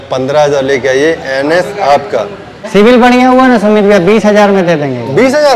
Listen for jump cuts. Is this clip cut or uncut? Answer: cut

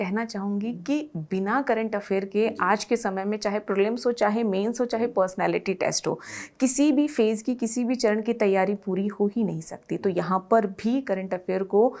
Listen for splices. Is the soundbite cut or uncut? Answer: uncut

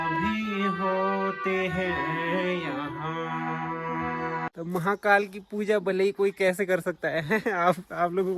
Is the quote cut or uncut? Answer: cut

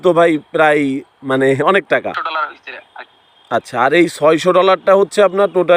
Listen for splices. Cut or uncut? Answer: cut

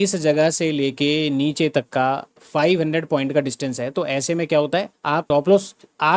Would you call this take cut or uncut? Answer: cut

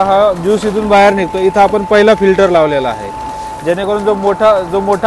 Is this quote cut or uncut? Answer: uncut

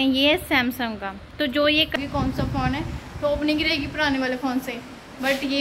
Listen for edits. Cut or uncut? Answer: cut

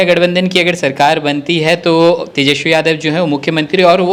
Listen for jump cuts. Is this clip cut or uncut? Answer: uncut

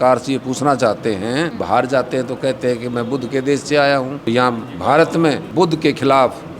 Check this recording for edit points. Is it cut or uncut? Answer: cut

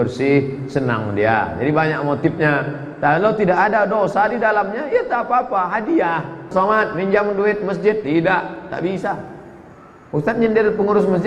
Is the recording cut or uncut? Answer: cut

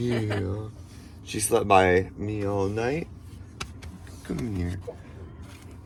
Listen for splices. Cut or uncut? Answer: uncut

